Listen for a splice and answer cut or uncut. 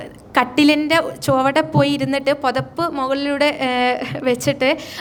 uncut